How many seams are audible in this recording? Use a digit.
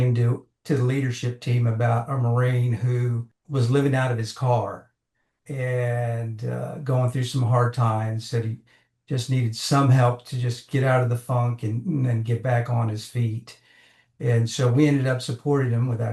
0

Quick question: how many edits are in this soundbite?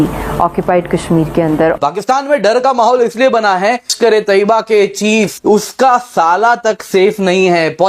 3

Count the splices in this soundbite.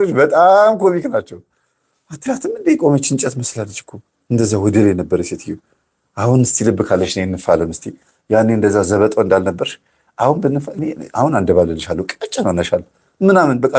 0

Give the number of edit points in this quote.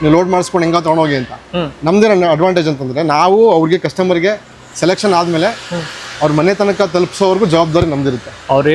0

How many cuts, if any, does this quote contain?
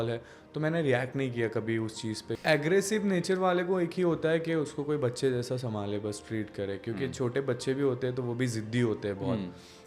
1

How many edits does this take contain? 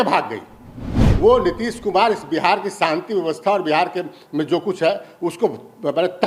1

